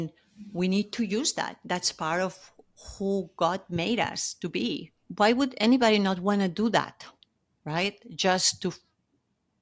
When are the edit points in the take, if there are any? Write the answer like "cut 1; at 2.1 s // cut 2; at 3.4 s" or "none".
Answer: cut 1; at 5.0 s